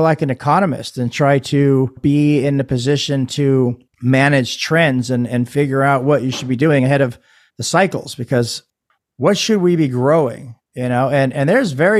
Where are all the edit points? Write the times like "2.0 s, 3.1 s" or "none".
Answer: 2.0 s, 3.9 s, 8.7 s